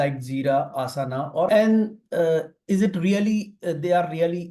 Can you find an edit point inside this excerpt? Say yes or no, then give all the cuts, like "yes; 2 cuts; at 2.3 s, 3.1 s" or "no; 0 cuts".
yes; 1 cut; at 1.5 s